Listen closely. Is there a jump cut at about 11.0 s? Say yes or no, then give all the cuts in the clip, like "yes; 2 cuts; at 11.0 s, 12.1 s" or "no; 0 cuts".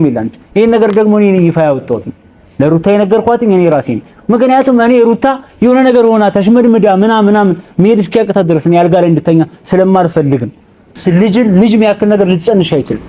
yes; 1 cut; at 11.0 s